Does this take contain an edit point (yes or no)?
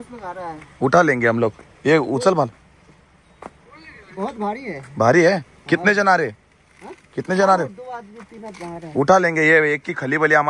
no